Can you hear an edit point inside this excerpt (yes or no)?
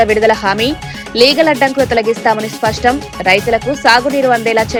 no